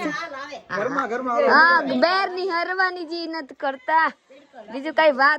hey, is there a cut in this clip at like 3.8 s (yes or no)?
no